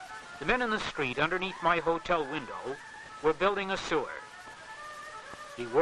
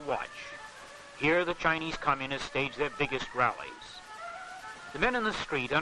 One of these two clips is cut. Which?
second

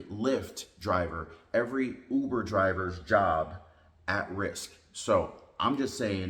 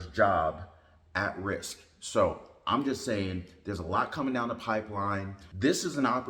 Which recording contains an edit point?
second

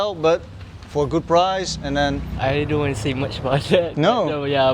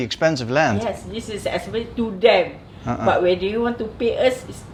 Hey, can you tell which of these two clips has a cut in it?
first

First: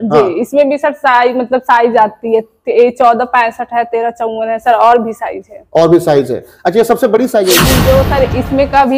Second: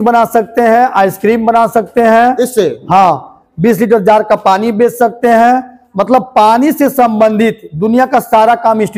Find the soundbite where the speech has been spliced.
first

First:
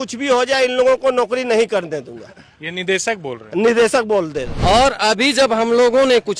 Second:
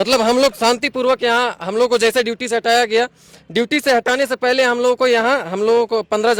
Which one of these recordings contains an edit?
first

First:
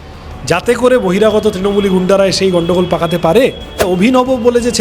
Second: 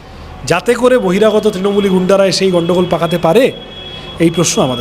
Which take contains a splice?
first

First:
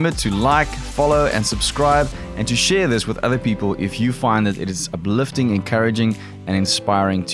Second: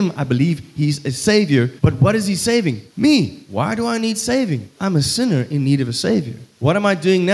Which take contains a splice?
second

